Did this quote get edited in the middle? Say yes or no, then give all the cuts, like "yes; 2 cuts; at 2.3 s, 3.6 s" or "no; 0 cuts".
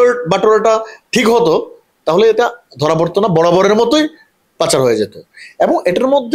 no; 0 cuts